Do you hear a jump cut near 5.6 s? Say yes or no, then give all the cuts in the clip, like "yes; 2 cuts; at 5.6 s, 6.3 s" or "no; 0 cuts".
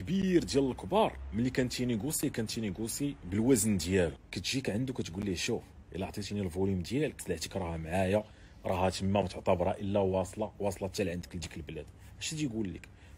no; 2 cuts; at 4.2 s, 7.2 s